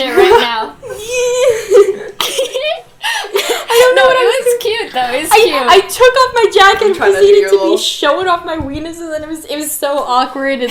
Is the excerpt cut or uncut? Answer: uncut